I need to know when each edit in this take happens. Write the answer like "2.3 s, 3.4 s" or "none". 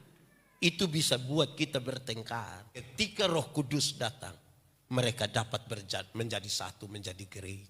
2.9 s